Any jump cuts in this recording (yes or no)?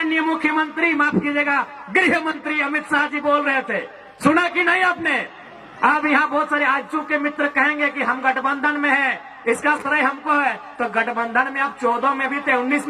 no